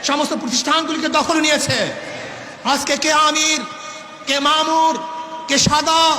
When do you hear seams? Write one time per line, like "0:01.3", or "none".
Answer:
0:02.4